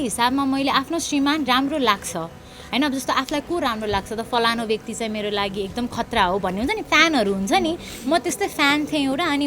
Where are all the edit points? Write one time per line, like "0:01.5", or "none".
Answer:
none